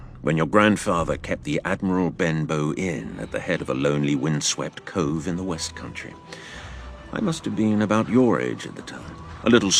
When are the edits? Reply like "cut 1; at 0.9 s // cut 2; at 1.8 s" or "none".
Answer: none

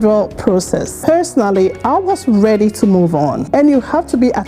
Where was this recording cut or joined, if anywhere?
cut 1; at 1.0 s // cut 2; at 3.4 s

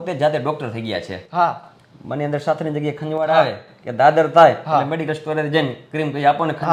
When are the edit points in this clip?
none

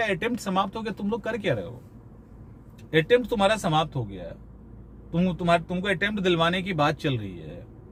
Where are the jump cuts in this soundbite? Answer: none

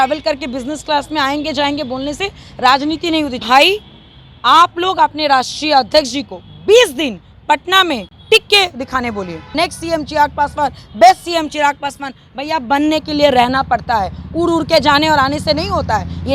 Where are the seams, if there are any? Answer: cut 1; at 3.4 s // cut 2; at 9.5 s

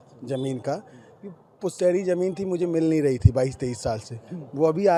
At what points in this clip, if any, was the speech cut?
none

